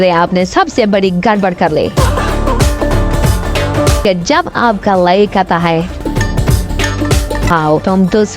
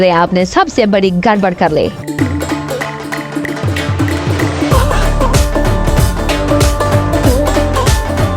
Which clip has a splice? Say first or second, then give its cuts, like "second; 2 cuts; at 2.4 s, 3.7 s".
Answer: first; 4 cuts; at 1.9 s, 4.0 s, 5.9 s, 7.5 s